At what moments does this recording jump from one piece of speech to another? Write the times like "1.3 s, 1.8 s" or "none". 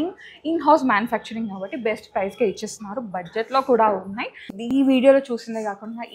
4.7 s